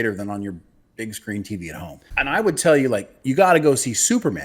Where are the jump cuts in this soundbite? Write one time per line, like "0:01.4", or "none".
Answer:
0:02.1